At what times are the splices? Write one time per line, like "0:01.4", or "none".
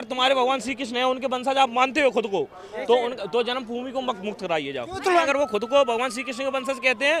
0:05.2